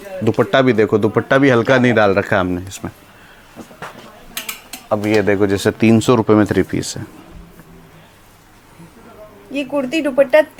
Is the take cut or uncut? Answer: uncut